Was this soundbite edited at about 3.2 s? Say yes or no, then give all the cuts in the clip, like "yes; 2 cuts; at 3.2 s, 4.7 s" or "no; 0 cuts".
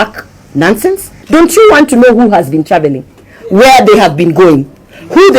no; 1 cut; at 1.1 s